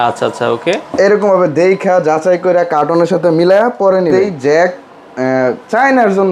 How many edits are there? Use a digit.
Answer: 1